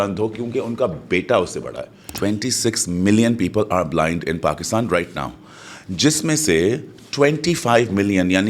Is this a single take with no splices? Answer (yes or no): no